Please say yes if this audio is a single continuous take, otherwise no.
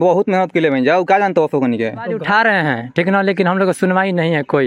no